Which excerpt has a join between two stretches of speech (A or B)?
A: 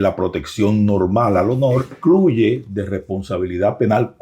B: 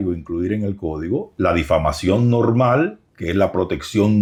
A